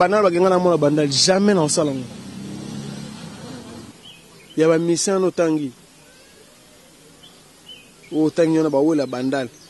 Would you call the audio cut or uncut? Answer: cut